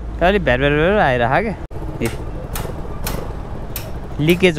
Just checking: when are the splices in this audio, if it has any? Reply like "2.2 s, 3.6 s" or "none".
1.7 s